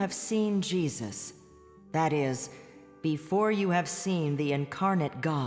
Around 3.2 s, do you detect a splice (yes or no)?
yes